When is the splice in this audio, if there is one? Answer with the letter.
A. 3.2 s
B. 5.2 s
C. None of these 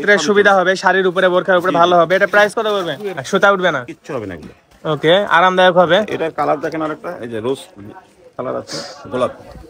A